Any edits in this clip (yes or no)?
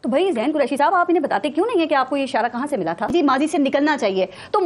yes